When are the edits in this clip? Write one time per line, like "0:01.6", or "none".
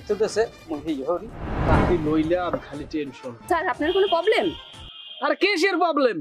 0:01.6